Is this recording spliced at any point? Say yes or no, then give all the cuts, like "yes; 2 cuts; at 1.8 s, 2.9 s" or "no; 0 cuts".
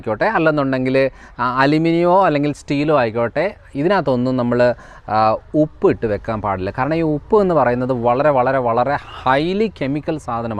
no; 0 cuts